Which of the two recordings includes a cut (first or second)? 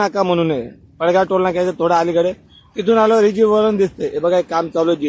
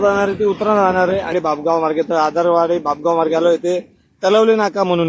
second